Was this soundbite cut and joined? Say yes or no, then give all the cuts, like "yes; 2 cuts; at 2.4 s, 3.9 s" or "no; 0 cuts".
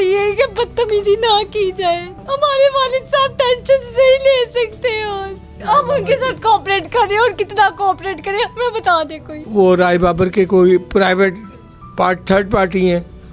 no; 0 cuts